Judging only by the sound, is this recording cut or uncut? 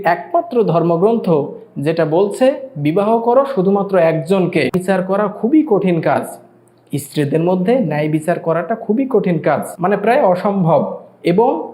cut